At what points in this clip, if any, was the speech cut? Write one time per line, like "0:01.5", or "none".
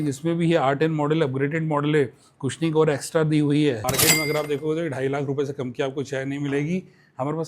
0:03.8

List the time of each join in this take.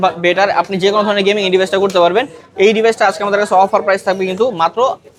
none

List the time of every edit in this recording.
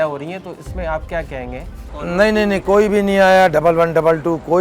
0:02.0

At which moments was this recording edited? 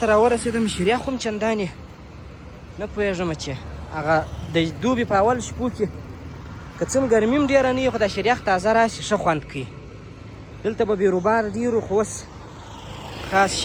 none

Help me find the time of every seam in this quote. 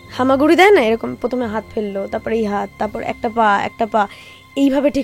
none

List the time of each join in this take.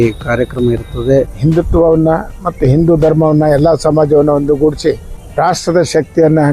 0:01.3
0:05.1

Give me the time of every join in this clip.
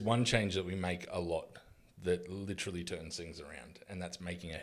none

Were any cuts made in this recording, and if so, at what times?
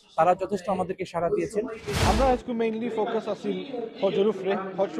0:01.9

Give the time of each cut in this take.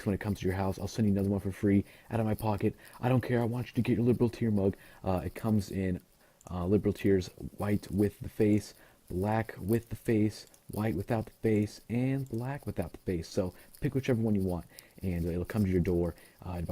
0:09.4

